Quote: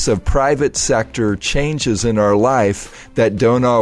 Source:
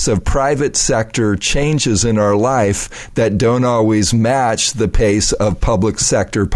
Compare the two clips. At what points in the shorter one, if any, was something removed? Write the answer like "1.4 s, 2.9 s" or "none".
none